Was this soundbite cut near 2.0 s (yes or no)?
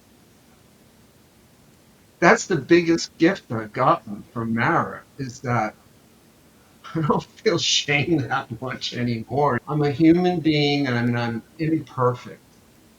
yes